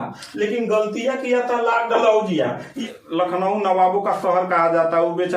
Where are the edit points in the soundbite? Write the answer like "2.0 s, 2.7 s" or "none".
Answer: 2.9 s